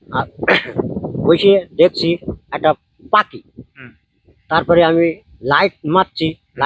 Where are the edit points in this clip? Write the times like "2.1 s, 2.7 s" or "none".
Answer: none